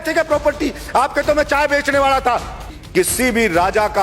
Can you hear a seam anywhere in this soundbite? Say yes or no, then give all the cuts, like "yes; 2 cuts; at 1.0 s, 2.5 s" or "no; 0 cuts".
yes; 1 cut; at 2.7 s